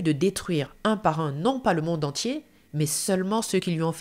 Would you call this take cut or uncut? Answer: uncut